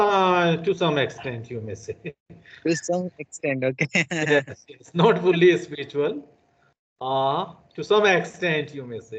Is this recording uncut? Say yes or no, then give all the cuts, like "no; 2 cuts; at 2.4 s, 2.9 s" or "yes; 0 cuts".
yes; 0 cuts